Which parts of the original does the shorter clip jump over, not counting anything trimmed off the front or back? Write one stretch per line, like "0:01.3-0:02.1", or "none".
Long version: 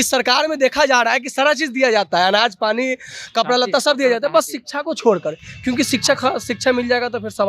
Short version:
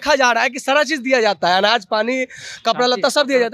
none